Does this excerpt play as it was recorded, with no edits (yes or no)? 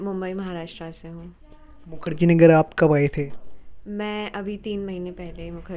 yes